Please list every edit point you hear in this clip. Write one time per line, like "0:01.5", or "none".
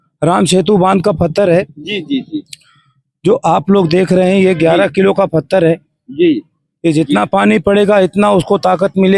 none